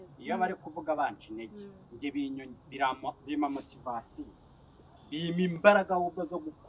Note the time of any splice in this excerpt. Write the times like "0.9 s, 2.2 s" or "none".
none